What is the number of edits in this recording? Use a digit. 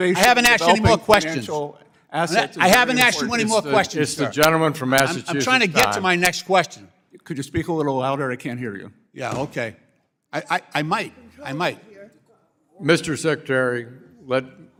0